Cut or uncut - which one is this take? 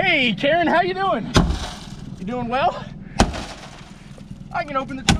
uncut